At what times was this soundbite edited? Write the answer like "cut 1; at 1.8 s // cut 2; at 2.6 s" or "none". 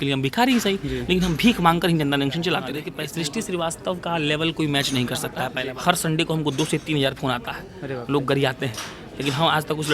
cut 1; at 2.9 s // cut 2; at 5.6 s